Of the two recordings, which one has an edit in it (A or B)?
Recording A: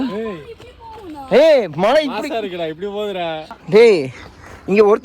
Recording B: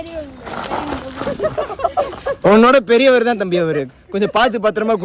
A